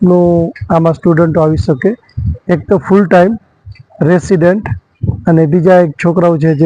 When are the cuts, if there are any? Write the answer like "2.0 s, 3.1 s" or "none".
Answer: none

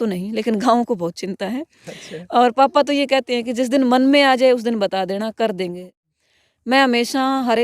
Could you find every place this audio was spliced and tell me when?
5.9 s

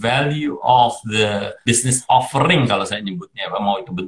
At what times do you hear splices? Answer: 1.6 s

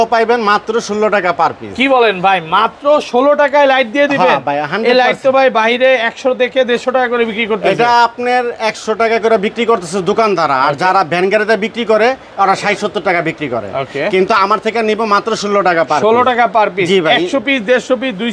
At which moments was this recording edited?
none

